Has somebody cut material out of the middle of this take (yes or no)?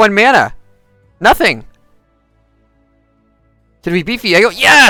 no